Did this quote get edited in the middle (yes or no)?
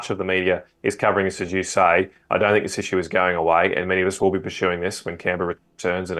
no